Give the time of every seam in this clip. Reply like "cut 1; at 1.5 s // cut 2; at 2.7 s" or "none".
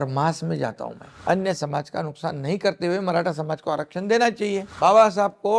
cut 1; at 1.1 s // cut 2; at 4.7 s

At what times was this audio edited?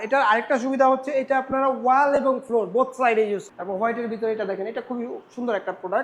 cut 1; at 3.5 s

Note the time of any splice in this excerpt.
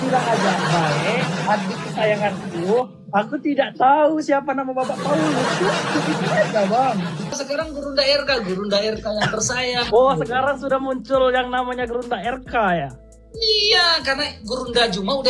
cut 1; at 7.4 s

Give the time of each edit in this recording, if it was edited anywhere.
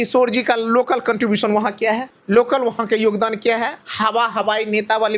cut 1; at 2.1 s // cut 2; at 3.8 s

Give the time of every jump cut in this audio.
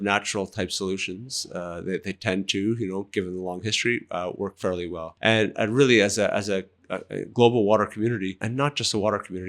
cut 1; at 5.0 s // cut 2; at 8.4 s

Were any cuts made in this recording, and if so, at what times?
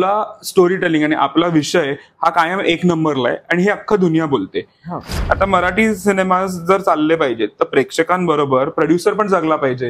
cut 1; at 5.1 s

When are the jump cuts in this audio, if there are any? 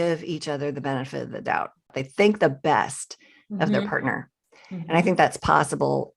cut 1; at 2.0 s

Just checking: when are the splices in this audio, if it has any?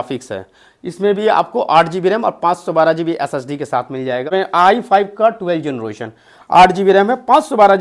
cut 1; at 4.3 s

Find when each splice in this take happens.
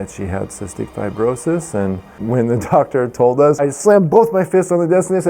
cut 1; at 2.1 s // cut 2; at 3.6 s

